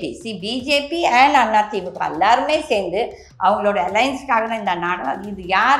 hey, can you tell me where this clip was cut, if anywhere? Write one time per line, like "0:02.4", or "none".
none

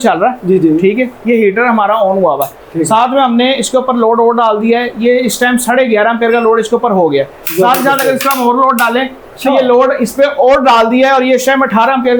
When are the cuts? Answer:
none

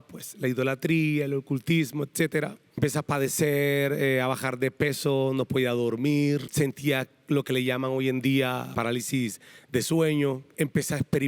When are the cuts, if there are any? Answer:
0:02.7
0:06.5
0:08.7
0:10.5

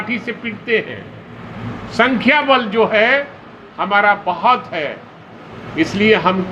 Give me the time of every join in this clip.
none

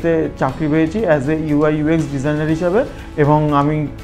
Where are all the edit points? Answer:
0:03.0

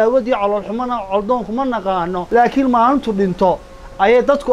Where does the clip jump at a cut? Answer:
0:02.2

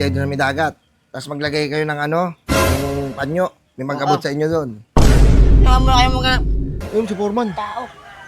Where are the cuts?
0:06.8

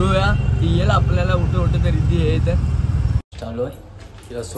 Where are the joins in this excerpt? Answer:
none

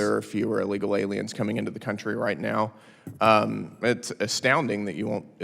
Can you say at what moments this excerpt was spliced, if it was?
none

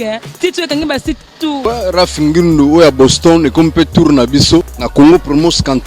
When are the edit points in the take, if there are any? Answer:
0:01.6
0:04.8

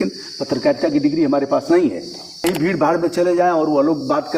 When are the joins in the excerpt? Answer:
0:02.5

